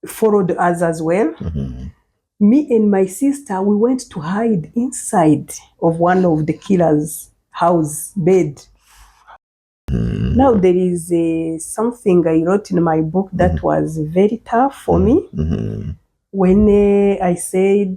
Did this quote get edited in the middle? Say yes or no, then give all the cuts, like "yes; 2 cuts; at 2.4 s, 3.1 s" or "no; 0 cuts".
yes; 1 cut; at 9.9 s